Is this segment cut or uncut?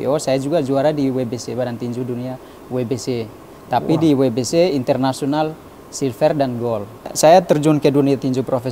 cut